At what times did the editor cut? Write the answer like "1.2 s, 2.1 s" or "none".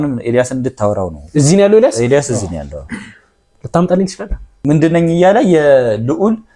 4.5 s

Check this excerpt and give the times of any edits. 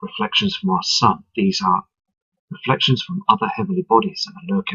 3.8 s

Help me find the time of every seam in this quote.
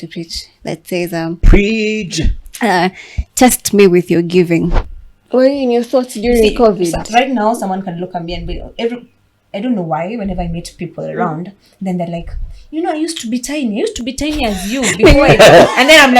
4.8 s

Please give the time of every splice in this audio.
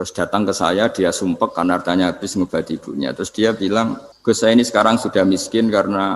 4.1 s

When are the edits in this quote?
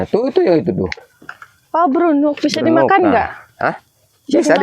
none

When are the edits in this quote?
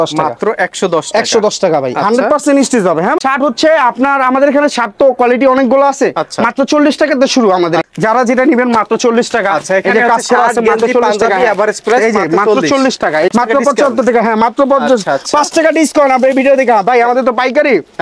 3.2 s, 7.9 s, 13.3 s

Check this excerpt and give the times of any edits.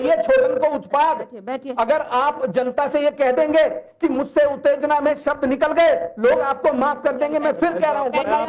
none

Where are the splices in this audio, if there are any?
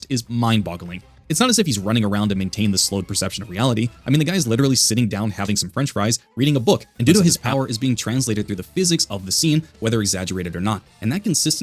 7.4 s

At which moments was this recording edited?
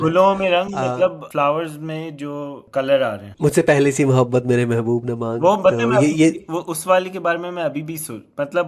1.2 s, 2.6 s, 3.3 s

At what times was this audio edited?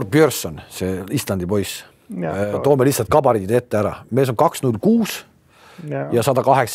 none

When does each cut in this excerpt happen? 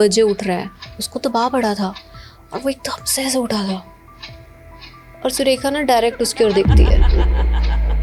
none

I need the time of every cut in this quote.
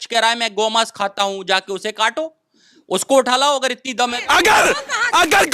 4.2 s

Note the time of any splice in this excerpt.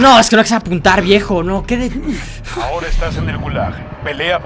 none

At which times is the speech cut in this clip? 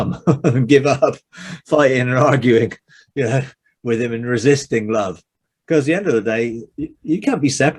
none

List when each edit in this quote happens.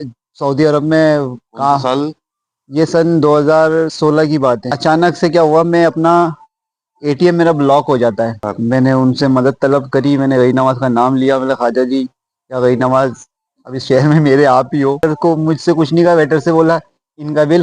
4.7 s, 8.4 s, 15.0 s

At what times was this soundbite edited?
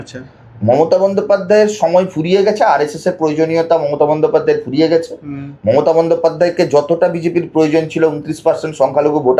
none

